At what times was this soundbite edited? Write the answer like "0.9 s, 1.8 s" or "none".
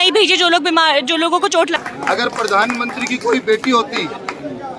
1.8 s